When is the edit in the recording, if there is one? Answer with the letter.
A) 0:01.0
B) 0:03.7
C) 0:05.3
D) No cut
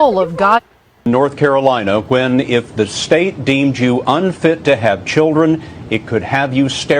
A